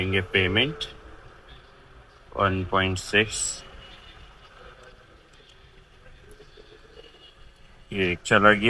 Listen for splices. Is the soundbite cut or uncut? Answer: uncut